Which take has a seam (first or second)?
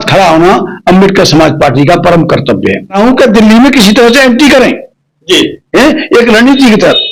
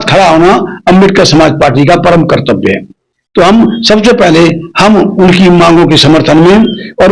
first